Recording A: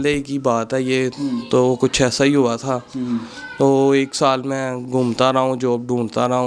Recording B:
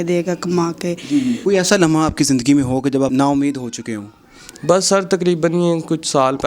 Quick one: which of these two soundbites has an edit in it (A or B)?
B